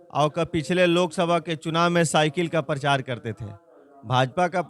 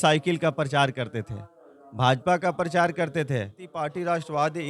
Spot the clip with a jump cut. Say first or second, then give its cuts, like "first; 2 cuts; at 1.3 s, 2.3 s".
second; 1 cut; at 3.7 s